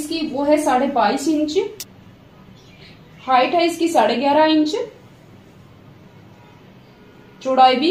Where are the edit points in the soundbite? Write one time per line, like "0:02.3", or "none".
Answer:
none